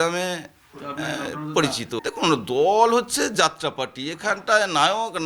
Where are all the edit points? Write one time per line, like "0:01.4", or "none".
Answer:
0:02.0